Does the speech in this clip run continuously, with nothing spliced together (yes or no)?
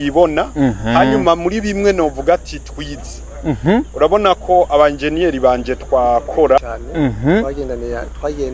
no